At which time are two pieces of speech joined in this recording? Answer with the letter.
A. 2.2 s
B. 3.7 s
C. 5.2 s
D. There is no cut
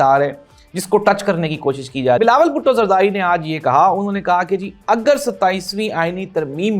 A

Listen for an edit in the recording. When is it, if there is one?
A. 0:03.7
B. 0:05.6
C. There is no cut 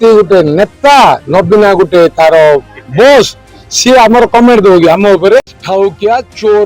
B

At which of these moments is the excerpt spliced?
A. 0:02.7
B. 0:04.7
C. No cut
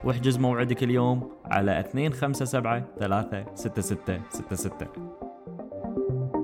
B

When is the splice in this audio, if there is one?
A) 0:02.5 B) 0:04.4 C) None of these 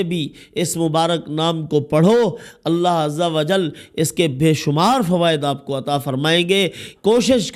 C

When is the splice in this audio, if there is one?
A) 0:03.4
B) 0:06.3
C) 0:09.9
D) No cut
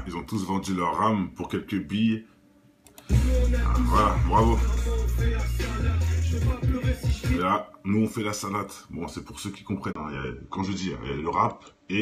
A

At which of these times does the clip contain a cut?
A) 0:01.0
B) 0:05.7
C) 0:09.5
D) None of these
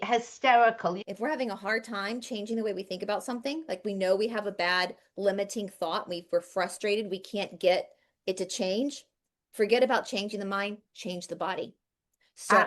A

